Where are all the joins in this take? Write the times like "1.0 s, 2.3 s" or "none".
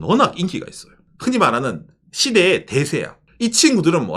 3.2 s